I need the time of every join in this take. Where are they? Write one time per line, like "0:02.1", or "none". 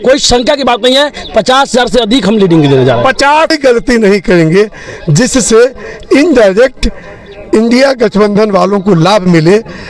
0:03.5